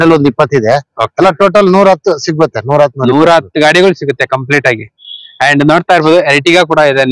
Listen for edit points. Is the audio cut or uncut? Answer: uncut